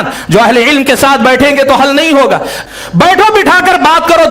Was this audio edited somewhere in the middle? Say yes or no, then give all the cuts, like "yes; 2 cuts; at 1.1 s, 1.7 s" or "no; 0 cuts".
yes; 1 cut; at 2.6 s